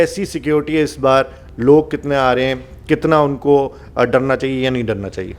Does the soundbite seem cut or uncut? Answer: uncut